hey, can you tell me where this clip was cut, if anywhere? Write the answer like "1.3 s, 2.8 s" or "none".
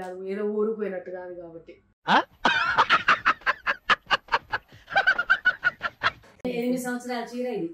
6.4 s